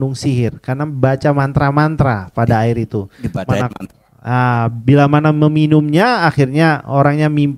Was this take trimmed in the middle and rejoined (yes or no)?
no